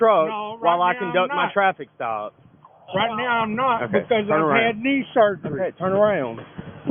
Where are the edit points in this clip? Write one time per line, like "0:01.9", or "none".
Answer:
none